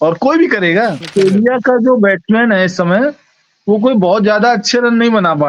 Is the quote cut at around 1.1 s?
yes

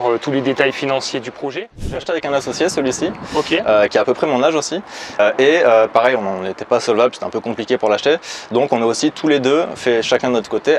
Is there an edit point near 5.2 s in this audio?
yes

